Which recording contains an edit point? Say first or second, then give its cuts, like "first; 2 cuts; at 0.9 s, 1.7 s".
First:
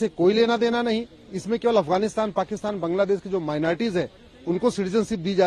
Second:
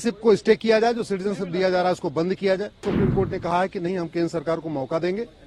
second; 1 cut; at 2.9 s